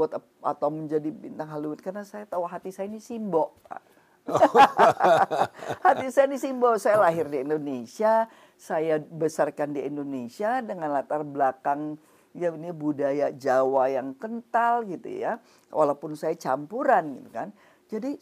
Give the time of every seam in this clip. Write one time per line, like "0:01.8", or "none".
none